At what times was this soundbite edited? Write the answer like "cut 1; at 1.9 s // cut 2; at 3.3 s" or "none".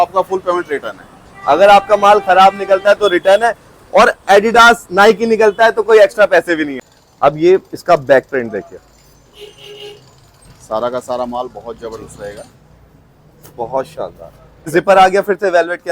cut 1; at 6.7 s // cut 2; at 14.7 s